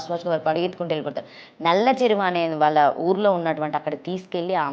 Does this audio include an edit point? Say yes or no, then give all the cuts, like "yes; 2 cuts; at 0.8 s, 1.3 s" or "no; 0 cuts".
no; 0 cuts